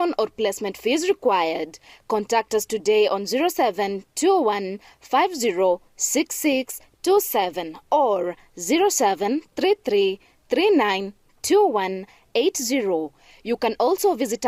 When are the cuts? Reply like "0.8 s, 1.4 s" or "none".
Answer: none